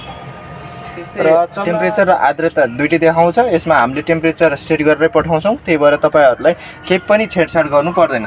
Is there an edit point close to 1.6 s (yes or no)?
yes